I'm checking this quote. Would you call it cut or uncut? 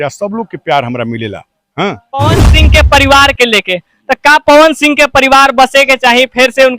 cut